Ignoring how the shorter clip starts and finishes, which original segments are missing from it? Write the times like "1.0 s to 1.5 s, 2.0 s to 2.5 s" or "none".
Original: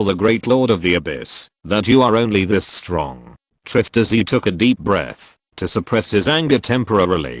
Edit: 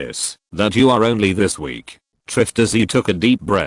2.9 s to 3.1 s